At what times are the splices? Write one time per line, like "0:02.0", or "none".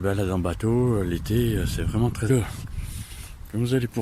0:02.3